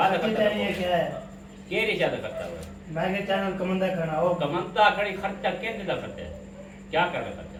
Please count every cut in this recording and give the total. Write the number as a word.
zero